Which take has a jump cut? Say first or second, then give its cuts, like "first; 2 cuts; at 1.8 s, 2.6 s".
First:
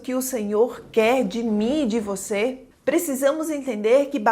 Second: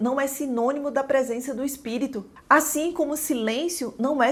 first; 1 cut; at 2.7 s